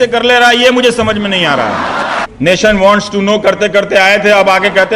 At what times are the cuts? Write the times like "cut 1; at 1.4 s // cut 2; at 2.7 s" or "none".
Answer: cut 1; at 2.2 s